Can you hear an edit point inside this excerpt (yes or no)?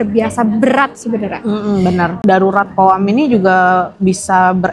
yes